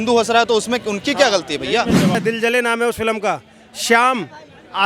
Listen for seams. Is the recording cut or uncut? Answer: cut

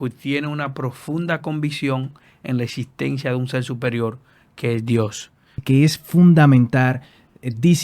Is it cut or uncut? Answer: cut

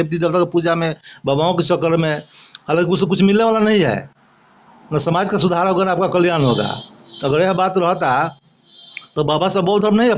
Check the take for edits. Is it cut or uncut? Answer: uncut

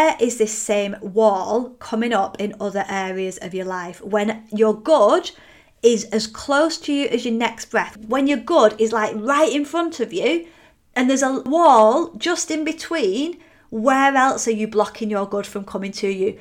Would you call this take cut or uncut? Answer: cut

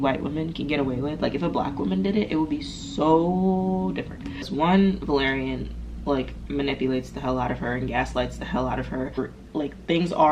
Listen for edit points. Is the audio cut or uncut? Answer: cut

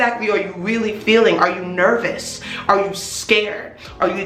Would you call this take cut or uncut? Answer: uncut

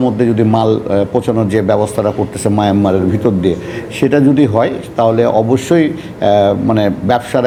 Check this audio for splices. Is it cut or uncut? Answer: uncut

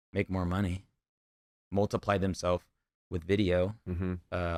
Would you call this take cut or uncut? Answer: uncut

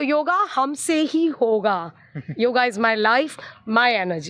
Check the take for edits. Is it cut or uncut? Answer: uncut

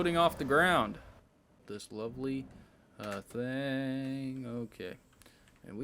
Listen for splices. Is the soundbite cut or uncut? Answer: cut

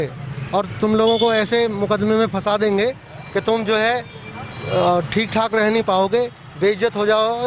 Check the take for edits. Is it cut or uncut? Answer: uncut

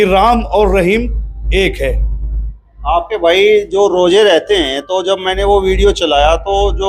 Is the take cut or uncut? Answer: uncut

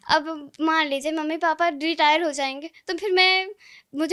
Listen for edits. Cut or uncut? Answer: uncut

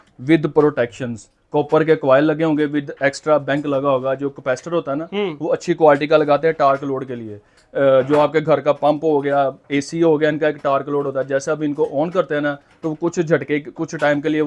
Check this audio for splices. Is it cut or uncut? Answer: uncut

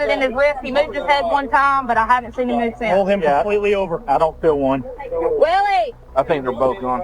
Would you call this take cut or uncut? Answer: cut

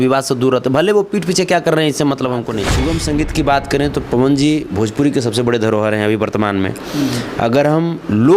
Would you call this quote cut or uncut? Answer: cut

